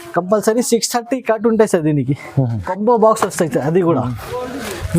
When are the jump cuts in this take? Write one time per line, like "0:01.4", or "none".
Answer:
0:02.7

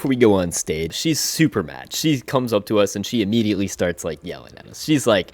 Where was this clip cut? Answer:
0:00.9

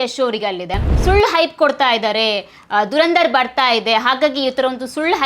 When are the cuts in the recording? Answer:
0:00.9

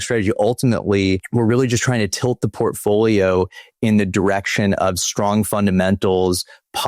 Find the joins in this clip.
0:01.2

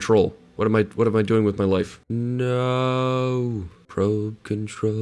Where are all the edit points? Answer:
0:02.0
0:03.7

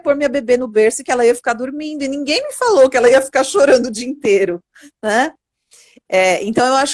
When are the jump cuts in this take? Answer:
none

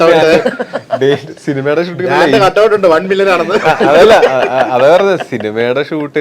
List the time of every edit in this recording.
none

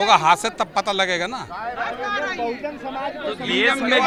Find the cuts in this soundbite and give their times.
none

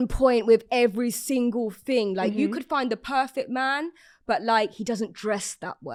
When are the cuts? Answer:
none

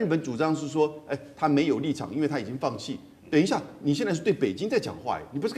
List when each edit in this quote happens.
none

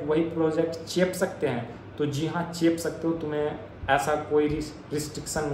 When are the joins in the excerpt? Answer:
none

